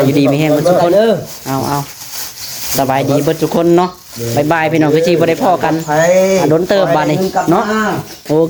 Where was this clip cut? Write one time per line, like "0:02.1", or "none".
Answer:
none